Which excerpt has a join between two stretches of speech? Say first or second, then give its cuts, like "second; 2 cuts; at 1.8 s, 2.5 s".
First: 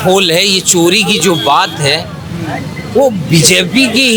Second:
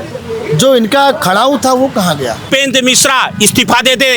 second; 1 cut; at 2.5 s